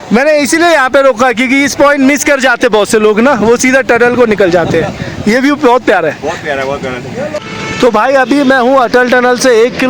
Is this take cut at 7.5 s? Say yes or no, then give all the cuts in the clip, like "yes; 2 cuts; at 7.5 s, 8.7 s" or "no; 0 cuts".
yes; 1 cut; at 7.5 s